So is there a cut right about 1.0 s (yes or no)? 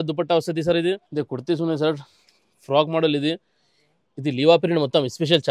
yes